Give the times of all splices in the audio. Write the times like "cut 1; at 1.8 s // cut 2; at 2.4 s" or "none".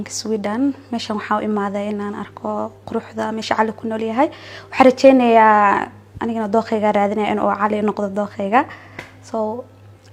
none